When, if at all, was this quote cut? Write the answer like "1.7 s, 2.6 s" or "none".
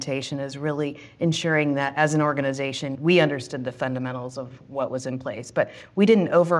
none